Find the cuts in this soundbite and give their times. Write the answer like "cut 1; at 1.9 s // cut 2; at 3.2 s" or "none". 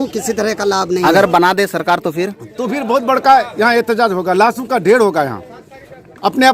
cut 1; at 1.0 s